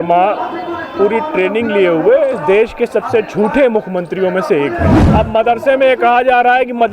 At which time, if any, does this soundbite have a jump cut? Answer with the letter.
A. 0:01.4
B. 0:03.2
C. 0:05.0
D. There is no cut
C